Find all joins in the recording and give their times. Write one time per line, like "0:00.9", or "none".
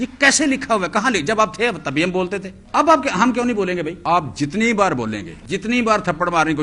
0:02.5
0:03.9
0:05.3